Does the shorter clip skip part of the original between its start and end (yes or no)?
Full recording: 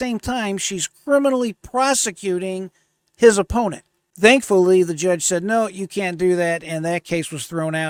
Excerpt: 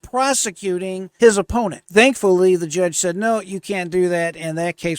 yes